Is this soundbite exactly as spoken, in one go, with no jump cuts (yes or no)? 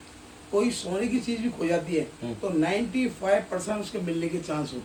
yes